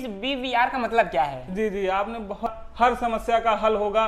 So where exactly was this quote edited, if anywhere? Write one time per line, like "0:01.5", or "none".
0:02.5